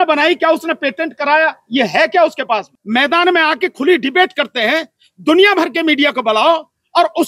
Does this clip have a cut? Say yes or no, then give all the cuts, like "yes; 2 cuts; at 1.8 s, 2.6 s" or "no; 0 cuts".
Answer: yes; 1 cut; at 2.7 s